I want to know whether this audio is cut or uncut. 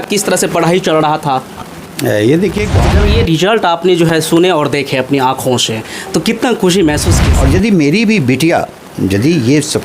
cut